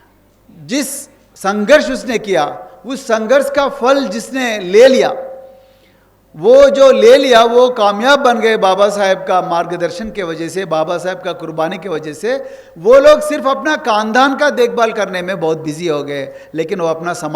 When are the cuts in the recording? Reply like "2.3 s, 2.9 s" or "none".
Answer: none